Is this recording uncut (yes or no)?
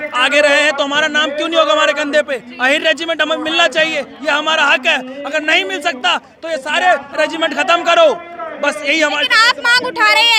yes